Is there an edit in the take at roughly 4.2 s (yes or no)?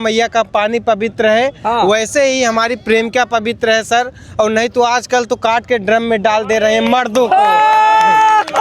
no